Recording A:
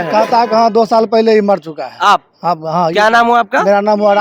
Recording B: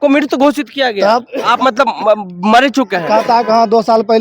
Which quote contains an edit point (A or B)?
B